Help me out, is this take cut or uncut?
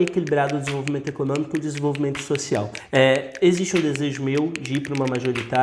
cut